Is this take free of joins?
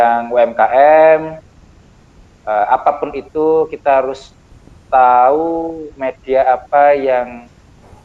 yes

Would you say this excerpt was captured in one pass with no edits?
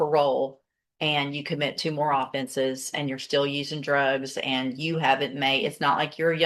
yes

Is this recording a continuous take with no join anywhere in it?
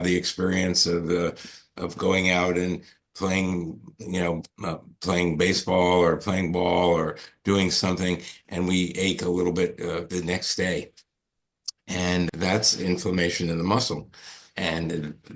no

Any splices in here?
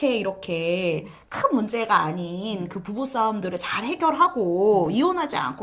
no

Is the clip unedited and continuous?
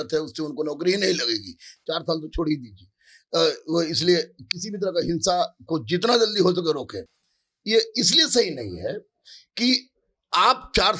yes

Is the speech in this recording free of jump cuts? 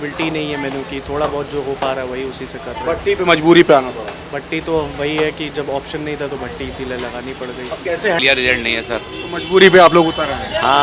no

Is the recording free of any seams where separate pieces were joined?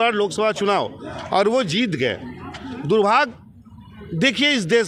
yes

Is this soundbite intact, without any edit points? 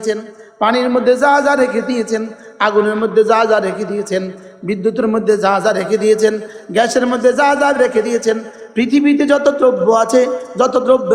yes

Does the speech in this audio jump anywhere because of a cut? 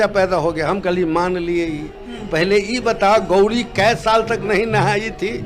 no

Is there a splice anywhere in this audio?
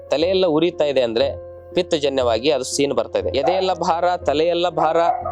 yes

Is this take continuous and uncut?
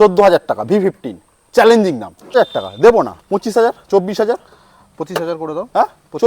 no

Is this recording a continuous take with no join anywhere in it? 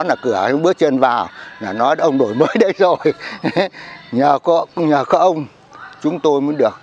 yes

